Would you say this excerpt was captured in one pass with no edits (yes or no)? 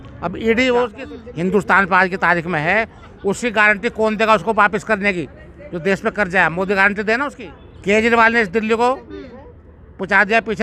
no